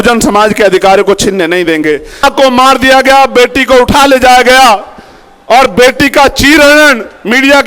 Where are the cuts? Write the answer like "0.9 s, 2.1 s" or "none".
2.2 s